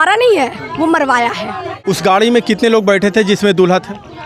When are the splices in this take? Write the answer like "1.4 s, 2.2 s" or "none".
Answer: 1.8 s